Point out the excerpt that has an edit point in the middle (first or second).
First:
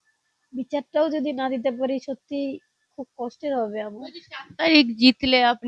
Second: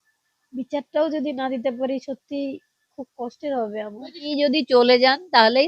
second